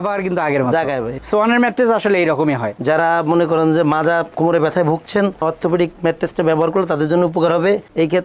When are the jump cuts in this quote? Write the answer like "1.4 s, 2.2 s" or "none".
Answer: 1.1 s, 2.7 s